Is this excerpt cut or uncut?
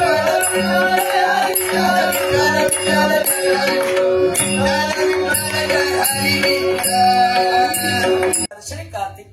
cut